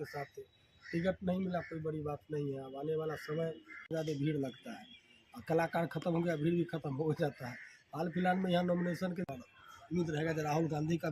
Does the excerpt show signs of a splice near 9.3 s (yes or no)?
yes